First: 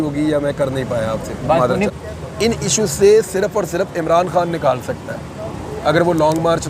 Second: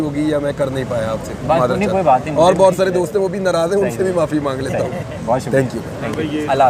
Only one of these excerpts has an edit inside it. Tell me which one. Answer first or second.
first